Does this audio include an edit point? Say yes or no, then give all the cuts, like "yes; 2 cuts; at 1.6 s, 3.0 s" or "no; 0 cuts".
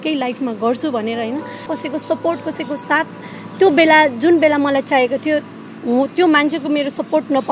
yes; 1 cut; at 1.7 s